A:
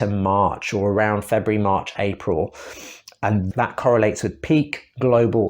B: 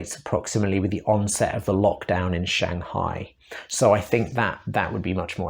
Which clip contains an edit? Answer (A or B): A